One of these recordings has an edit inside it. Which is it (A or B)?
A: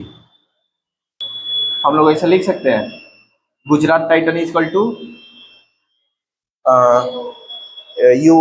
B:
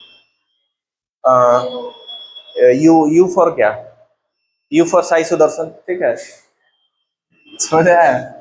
A